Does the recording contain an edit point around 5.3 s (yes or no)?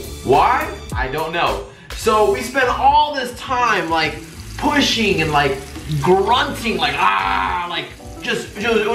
yes